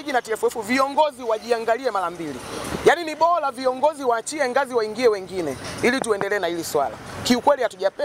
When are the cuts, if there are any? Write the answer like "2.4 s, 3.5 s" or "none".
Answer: none